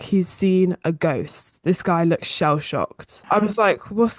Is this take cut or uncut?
cut